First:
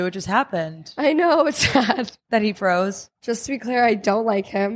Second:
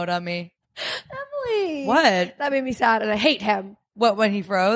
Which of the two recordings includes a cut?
first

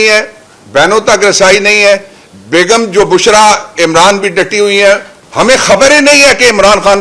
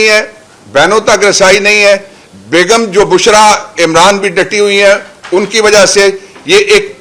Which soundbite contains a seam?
first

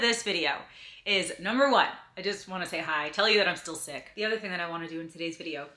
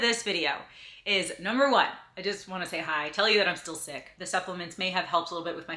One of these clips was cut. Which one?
first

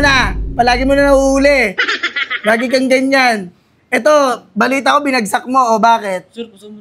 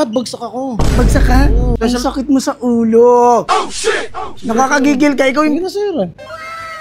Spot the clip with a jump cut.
second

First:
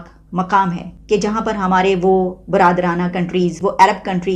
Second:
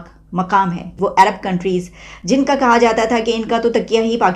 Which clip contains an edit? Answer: second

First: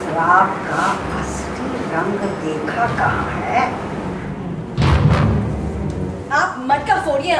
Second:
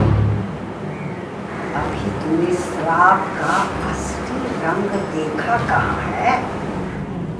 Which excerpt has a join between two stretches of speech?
first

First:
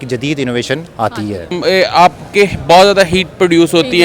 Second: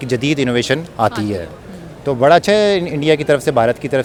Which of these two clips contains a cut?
first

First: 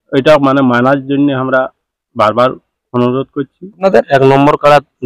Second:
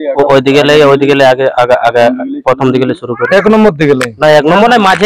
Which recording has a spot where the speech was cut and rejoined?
first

